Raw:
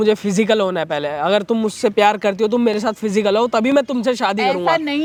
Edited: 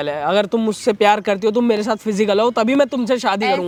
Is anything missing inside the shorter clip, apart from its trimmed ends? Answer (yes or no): no